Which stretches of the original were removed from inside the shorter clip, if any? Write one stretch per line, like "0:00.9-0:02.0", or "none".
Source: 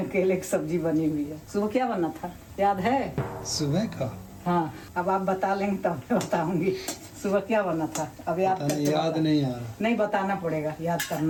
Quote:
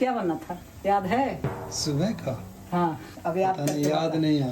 0:04.8-0:08.1